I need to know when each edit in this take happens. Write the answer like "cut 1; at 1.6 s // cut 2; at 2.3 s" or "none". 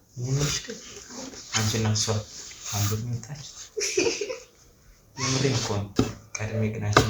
cut 1; at 5.9 s